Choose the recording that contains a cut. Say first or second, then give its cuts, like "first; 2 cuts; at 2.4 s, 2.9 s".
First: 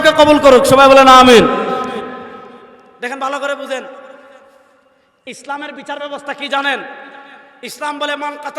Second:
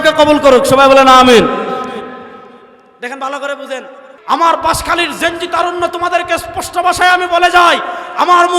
second; 1 cut; at 4.1 s